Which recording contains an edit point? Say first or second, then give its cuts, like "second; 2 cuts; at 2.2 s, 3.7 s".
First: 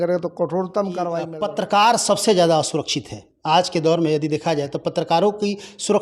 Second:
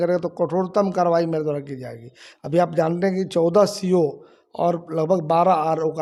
first; 1 cut; at 1.3 s